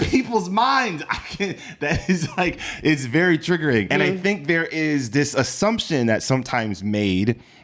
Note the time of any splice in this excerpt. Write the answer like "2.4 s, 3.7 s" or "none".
3.9 s